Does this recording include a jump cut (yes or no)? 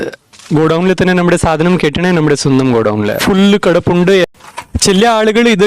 yes